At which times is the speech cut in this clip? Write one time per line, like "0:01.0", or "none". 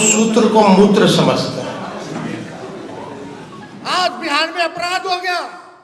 0:03.7